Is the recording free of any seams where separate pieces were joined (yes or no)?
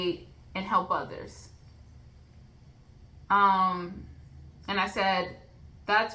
yes